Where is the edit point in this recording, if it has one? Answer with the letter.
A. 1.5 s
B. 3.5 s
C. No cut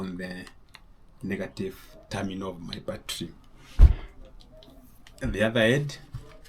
C